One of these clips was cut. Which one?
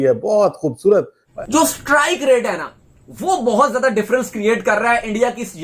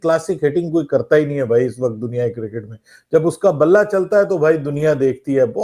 first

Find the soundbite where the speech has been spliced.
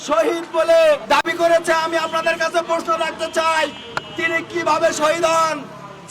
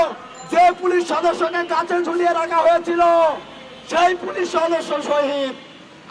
first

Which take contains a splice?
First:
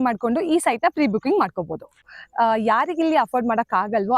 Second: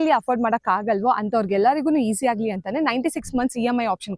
first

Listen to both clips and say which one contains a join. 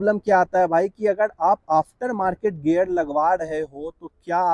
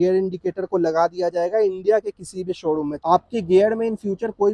second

